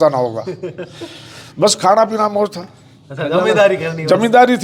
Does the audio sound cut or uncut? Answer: uncut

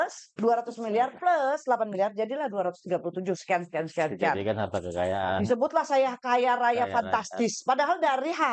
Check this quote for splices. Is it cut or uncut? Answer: uncut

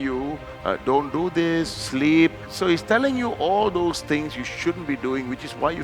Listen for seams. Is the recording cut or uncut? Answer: cut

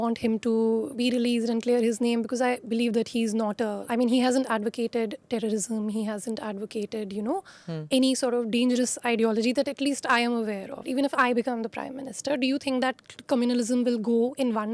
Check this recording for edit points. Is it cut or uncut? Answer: cut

